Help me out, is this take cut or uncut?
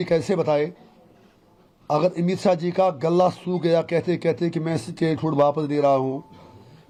uncut